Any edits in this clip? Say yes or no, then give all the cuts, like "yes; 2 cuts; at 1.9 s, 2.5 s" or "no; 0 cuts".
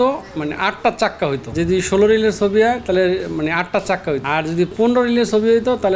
yes; 2 cuts; at 1.5 s, 4.2 s